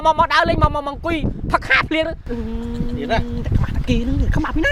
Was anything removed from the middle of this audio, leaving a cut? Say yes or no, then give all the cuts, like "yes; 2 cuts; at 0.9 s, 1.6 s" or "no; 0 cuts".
no; 0 cuts